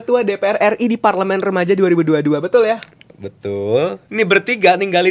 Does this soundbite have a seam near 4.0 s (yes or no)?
yes